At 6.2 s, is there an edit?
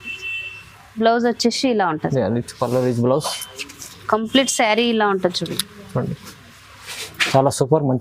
no; 0 cuts

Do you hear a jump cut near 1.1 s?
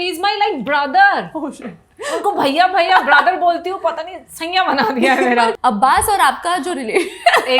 no; 1 cut; at 5.6 s

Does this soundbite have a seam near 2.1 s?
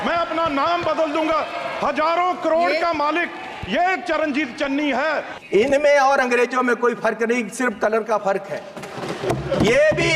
no; 1 cut; at 5.3 s

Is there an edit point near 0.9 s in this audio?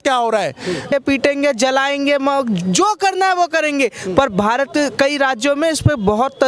yes; 1 cut; at 0.9 s

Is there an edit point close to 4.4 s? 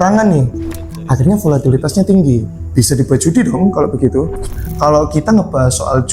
yes; 1 cut; at 4.4 s

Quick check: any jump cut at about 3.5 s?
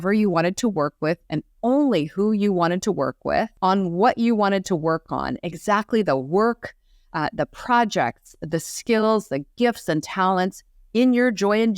yes; 1 cut; at 3.5 s

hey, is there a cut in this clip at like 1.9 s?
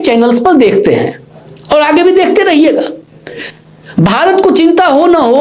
no; 1 cut; at 3.4 s

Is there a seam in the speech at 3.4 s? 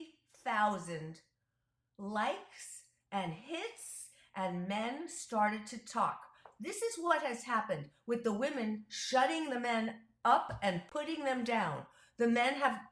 no; 1 cut; at 10.8 s

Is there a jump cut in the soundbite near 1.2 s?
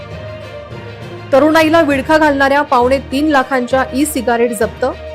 yes; 1 cut; at 1.2 s

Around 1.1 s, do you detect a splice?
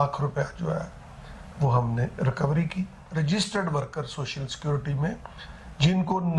no; 1 cut; at 3.0 s

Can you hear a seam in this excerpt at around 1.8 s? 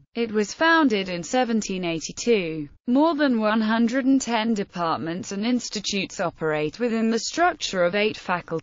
yes; 1 cut; at 1.8 s

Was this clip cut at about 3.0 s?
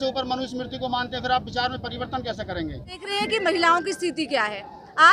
yes; 1 cut; at 3.0 s

